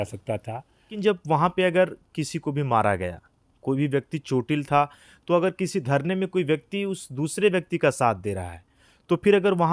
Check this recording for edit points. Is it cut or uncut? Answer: cut